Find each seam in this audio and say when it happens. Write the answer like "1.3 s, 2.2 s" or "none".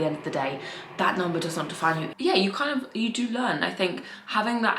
2.1 s

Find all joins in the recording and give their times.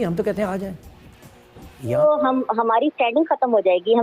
2.0 s

